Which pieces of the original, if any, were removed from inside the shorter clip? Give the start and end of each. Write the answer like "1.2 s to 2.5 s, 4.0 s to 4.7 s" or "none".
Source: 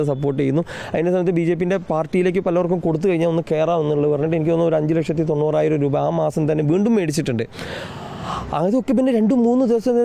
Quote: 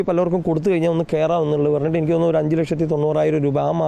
none